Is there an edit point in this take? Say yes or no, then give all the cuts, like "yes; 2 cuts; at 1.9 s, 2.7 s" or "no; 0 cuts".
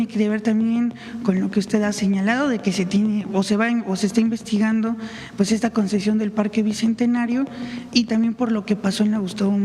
no; 0 cuts